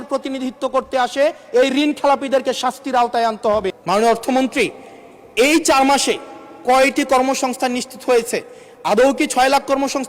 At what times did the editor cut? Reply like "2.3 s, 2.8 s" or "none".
3.8 s